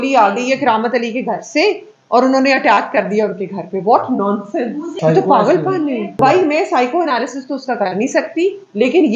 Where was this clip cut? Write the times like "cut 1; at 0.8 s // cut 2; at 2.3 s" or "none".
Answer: cut 1; at 4.9 s // cut 2; at 6.2 s